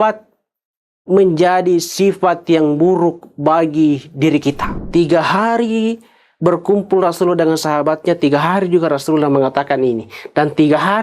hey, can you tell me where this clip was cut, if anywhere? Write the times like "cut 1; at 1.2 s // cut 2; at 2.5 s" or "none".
cut 1; at 4.7 s